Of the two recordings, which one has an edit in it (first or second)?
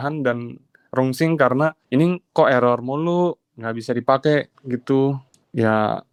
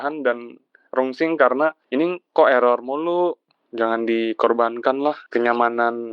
second